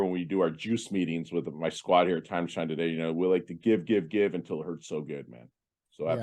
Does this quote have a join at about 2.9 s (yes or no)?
no